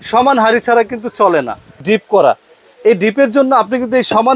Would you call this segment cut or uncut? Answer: cut